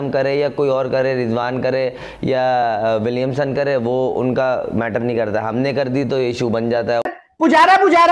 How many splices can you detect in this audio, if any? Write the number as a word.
one